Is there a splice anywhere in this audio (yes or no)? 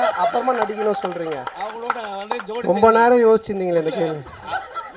no